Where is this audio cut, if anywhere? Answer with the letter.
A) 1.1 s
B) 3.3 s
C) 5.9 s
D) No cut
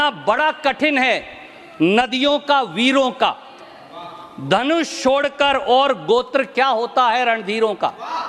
D